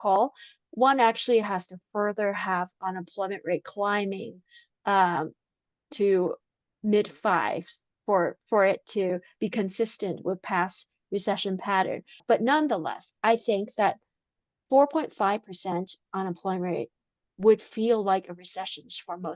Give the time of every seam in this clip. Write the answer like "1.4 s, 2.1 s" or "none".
12.2 s